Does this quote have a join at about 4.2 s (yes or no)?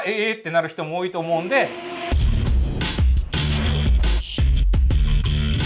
no